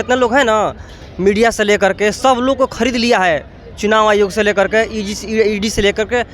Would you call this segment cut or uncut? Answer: uncut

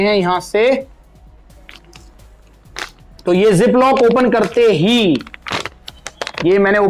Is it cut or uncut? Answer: uncut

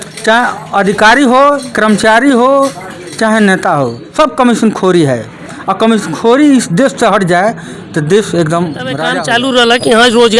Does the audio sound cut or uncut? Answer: cut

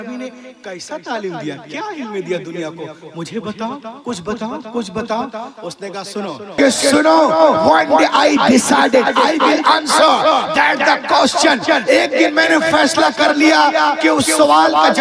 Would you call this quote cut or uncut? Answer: cut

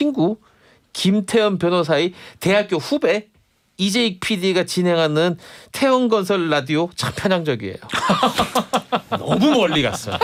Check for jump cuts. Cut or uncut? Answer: uncut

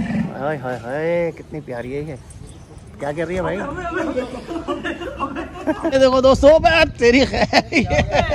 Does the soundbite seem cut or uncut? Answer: uncut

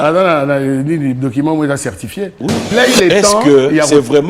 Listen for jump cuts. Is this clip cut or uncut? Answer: cut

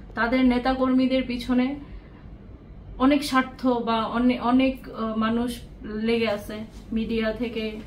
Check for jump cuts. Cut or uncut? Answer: uncut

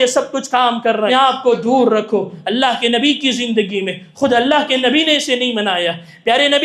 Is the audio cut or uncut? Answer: cut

